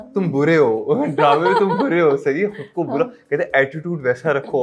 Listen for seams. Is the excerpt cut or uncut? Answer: uncut